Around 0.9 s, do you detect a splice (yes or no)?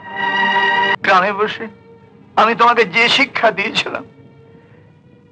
yes